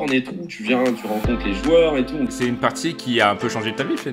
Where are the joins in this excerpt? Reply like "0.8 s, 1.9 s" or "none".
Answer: 2.3 s